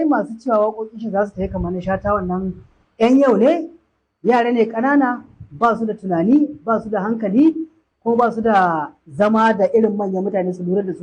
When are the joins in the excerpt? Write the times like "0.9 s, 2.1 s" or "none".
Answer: none